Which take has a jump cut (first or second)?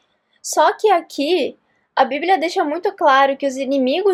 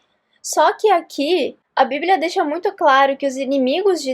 second